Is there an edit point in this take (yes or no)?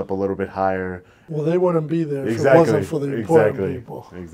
yes